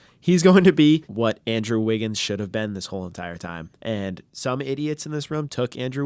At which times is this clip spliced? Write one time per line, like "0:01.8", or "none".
0:01.1
0:03.7
0:04.3